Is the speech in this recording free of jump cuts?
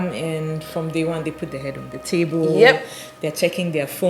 yes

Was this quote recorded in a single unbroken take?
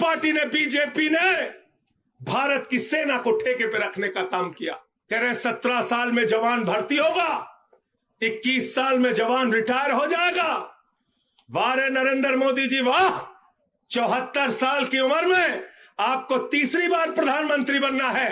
no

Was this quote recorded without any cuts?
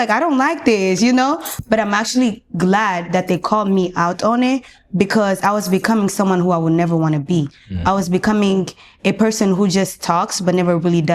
yes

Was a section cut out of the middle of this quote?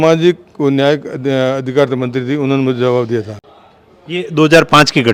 no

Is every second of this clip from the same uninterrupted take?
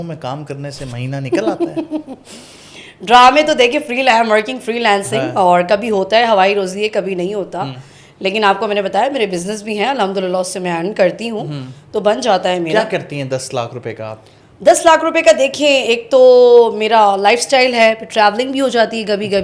yes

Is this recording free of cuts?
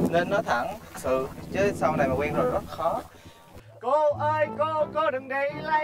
no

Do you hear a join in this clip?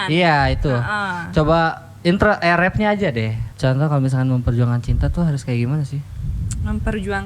yes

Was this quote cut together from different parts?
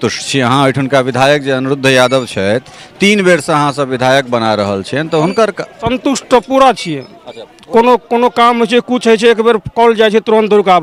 no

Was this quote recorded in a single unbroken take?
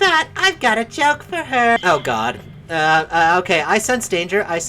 no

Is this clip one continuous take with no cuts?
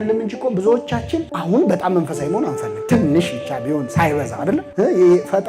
yes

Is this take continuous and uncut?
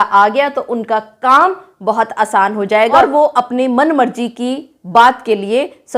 no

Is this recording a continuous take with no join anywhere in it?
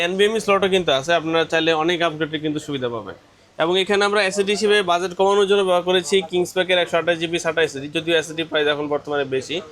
yes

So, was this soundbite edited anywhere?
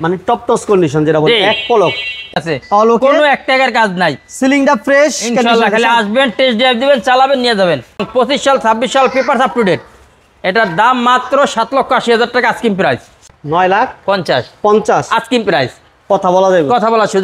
yes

